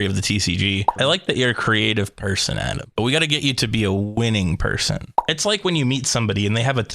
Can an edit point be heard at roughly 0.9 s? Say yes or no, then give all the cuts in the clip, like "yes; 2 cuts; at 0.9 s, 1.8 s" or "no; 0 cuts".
yes; 2 cuts; at 0.9 s, 5.1 s